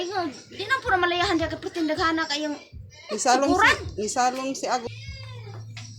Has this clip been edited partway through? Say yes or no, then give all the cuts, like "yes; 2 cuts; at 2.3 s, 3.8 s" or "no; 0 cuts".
yes; 1 cut; at 4.9 s